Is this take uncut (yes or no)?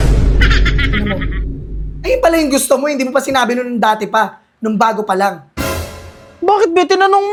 yes